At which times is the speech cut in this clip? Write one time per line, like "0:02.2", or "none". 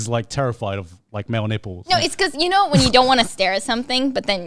none